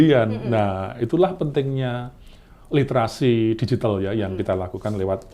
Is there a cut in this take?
no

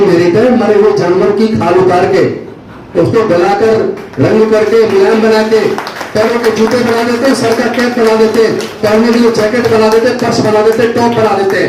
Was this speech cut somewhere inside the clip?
no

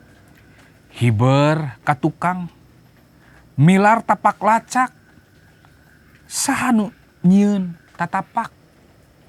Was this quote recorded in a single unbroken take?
yes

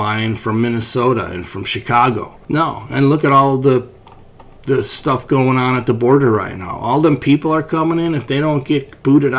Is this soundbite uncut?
no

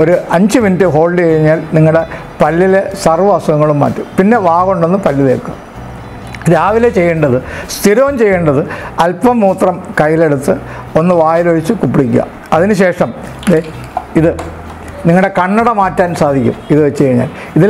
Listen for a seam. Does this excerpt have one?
no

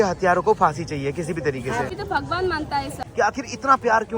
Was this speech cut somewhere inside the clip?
yes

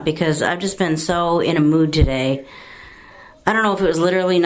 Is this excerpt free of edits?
yes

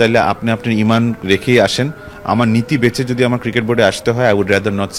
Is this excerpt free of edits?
yes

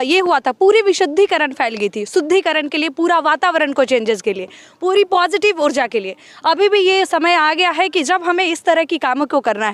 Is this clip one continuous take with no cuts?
yes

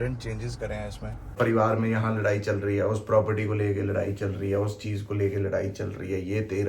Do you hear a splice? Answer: yes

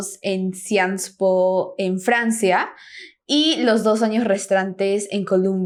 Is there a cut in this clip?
no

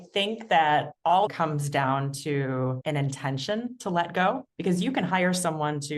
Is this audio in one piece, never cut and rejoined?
no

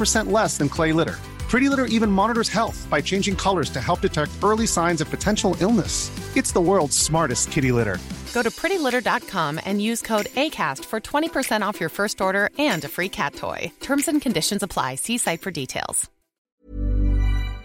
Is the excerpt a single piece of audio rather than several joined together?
no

